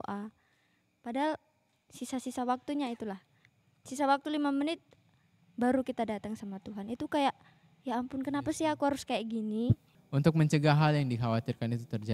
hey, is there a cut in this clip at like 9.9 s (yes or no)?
yes